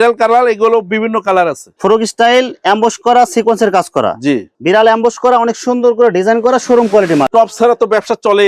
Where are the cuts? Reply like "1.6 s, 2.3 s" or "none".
1.6 s, 4.5 s, 7.3 s